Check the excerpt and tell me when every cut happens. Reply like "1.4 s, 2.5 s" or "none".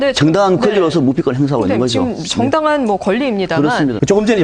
3.2 s